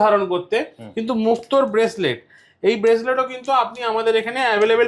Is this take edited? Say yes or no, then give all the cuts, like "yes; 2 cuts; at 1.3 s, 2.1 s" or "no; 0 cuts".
no; 0 cuts